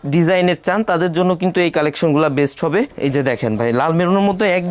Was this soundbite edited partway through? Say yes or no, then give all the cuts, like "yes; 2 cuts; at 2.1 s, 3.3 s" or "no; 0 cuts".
no; 0 cuts